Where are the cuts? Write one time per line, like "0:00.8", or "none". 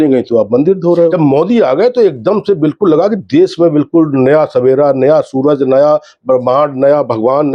0:01.1